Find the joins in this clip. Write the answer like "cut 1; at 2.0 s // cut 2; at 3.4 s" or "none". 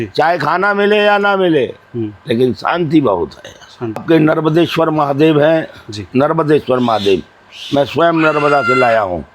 cut 1; at 4.0 s